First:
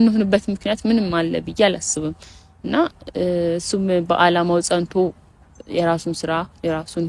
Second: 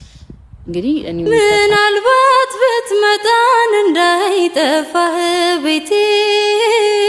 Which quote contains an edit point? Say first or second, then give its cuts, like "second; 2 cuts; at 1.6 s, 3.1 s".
second; 1 cut; at 1.3 s